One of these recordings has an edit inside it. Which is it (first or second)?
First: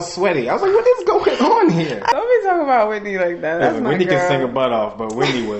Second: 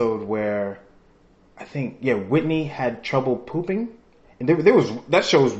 first